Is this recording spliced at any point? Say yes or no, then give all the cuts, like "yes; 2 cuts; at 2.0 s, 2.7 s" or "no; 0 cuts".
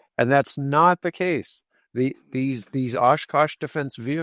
no; 0 cuts